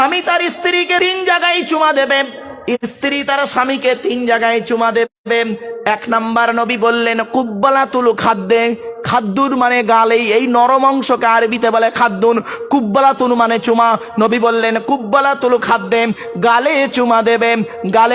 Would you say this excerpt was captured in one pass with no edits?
no; 1 cut; at 1.0 s

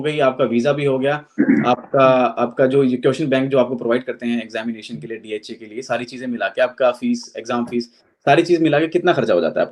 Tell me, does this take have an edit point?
no; 0 cuts

